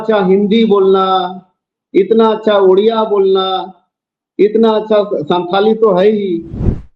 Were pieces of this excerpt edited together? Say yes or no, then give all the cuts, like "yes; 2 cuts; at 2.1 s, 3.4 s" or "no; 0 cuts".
no; 0 cuts